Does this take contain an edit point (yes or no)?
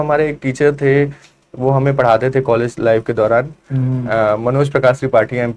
no